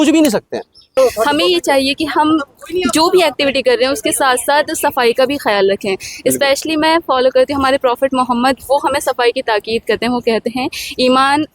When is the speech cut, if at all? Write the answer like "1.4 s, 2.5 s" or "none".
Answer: 0.9 s